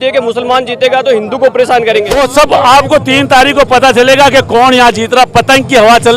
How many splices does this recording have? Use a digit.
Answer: 1